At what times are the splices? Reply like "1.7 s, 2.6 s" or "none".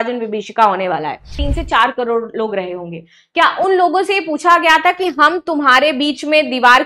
1.4 s